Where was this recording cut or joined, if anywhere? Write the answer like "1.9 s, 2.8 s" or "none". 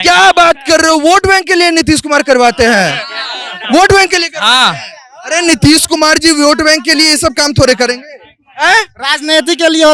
none